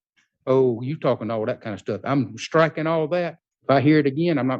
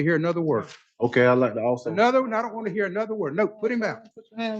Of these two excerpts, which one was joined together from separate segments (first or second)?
first